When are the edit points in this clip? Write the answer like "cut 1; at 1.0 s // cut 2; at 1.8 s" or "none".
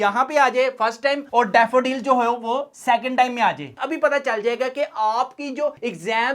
cut 1; at 3.8 s

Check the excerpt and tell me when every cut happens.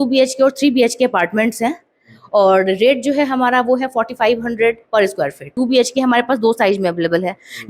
cut 1; at 5.4 s

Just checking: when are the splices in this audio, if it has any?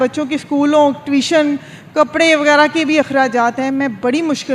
none

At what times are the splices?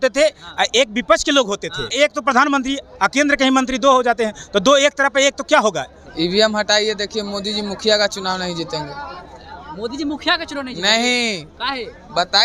cut 1; at 1.9 s // cut 2; at 6.0 s

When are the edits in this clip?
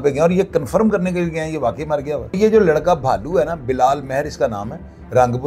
cut 1; at 2.3 s

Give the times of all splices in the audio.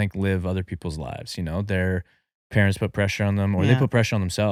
none

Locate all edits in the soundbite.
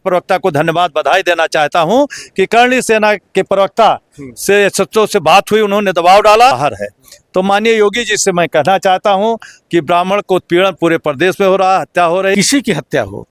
cut 1; at 6.6 s // cut 2; at 12.3 s

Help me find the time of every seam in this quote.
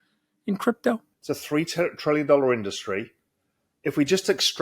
cut 1; at 1.1 s

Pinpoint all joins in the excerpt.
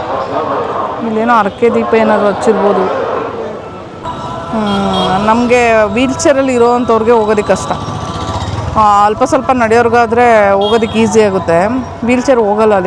cut 1; at 4.1 s

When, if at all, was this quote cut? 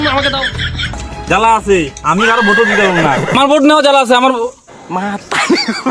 cut 1; at 1.0 s

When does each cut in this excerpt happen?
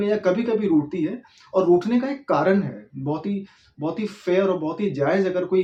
none

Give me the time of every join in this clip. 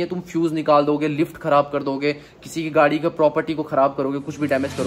none

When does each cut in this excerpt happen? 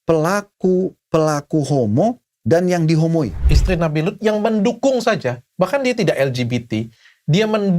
cut 1; at 3.5 s

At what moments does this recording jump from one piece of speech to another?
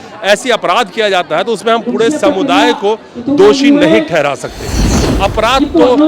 cut 1; at 4.8 s

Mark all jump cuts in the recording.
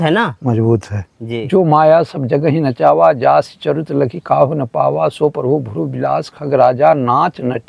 cut 1; at 1.2 s

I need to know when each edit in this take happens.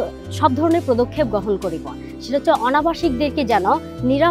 cut 1; at 2.1 s

